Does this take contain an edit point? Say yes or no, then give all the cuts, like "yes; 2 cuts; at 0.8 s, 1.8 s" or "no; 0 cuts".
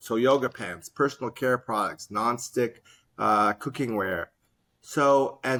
no; 0 cuts